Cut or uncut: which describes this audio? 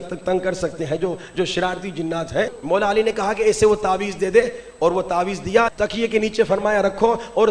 cut